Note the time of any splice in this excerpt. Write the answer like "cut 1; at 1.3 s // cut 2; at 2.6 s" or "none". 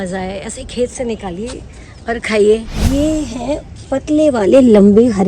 cut 1; at 2.7 s